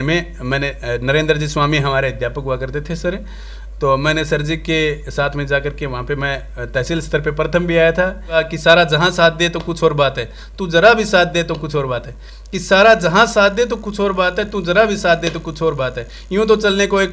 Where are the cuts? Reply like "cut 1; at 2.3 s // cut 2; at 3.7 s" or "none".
cut 1; at 8.4 s